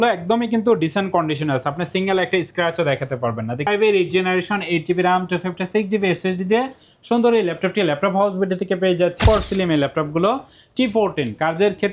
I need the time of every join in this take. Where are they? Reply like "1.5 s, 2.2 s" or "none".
3.7 s, 9.2 s